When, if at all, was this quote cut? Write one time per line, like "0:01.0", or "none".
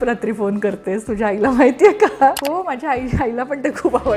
0:02.4